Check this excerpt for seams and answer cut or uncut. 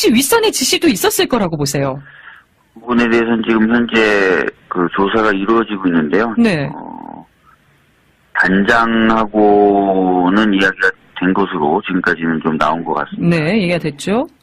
cut